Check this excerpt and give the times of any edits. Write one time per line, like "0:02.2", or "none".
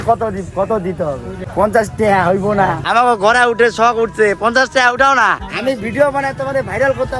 0:01.3
0:02.8
0:05.5